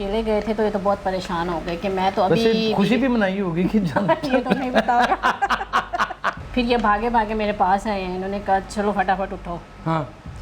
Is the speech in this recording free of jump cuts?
no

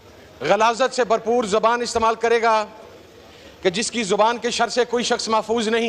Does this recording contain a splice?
no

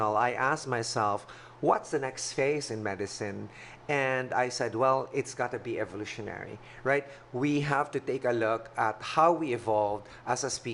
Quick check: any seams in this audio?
no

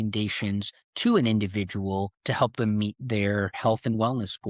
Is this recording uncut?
no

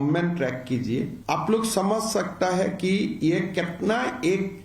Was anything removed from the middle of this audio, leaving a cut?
yes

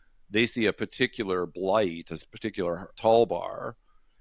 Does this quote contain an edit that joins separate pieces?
yes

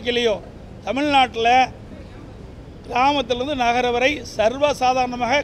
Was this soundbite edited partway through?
no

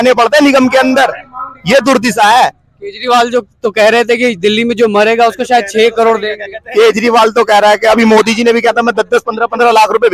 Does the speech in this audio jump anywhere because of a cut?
no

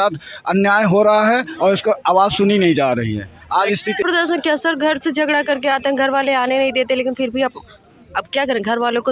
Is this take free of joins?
no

